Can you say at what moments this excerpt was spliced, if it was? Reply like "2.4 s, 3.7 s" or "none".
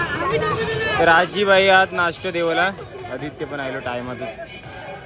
none